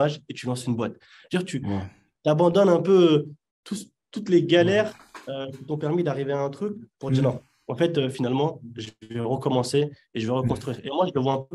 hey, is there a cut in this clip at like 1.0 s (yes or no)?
no